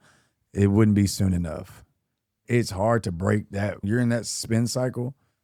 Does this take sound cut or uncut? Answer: cut